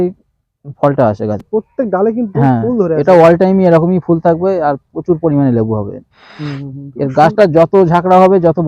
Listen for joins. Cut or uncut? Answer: cut